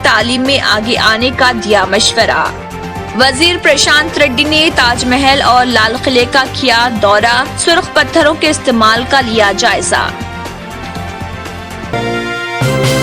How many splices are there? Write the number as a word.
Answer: one